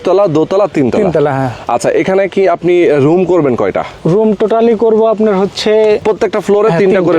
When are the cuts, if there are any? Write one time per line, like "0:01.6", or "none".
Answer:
0:03.9
0:06.0